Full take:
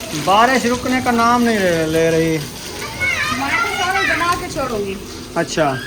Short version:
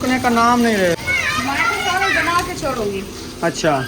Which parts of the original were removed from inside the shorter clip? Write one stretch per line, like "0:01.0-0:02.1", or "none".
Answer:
0:01.8-0:02.9